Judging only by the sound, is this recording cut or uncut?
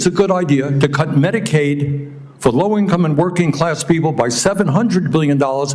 uncut